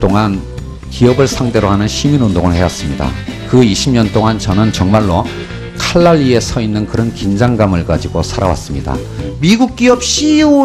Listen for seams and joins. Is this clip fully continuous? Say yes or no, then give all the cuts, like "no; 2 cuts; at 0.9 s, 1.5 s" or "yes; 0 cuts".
yes; 0 cuts